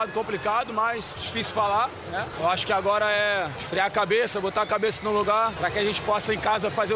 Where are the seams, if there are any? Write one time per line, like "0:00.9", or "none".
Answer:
0:01.2
0:02.3
0:03.6
0:05.5